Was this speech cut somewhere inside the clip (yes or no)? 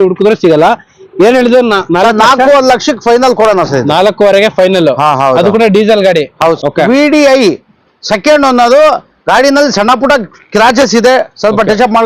yes